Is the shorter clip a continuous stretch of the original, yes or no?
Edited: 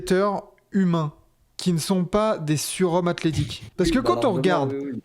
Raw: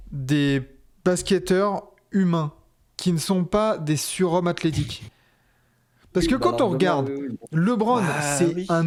no